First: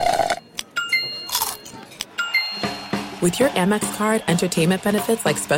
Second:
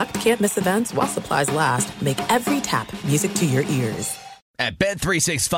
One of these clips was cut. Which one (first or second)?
second